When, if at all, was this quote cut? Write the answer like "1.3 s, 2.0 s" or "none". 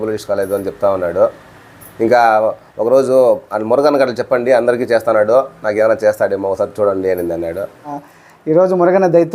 8.0 s